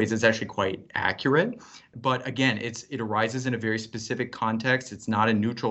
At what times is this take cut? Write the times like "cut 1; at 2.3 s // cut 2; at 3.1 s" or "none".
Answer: cut 1; at 1.9 s